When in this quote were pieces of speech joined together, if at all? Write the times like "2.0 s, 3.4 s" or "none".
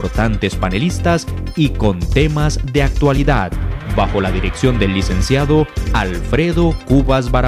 none